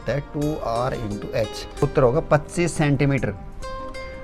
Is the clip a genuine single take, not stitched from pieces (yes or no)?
no